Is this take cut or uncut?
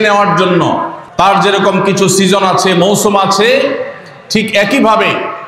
cut